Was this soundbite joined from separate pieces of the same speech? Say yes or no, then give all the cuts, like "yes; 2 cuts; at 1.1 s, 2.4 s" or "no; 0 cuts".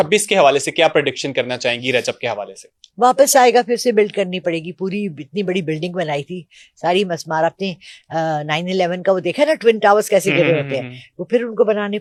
no; 0 cuts